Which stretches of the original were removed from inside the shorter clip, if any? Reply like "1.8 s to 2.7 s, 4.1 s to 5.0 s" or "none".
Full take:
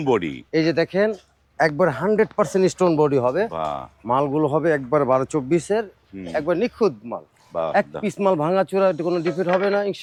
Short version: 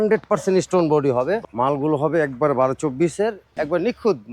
3.5 s to 4.0 s, 6.0 s to 6.2 s